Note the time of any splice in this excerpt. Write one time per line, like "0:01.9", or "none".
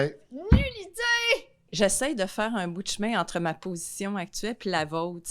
0:01.7